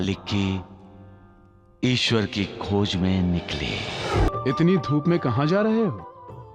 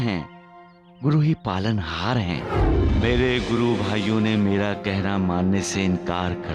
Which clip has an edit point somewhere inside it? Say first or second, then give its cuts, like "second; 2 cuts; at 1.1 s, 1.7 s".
first; 1 cut; at 4.3 s